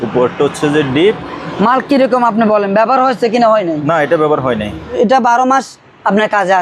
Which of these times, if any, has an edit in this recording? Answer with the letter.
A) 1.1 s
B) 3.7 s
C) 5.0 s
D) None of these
C